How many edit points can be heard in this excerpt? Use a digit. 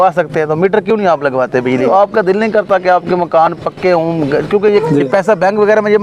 2